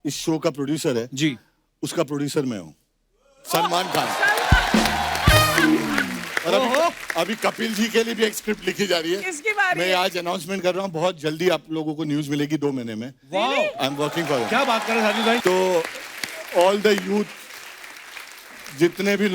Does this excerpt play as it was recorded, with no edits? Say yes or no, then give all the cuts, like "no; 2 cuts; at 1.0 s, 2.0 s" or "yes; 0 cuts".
no; 1 cut; at 15.4 s